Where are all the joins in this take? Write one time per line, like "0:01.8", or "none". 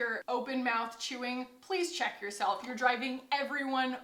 none